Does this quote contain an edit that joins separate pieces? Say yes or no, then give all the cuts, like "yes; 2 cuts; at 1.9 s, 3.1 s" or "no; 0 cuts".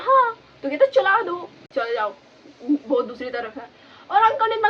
yes; 1 cut; at 1.6 s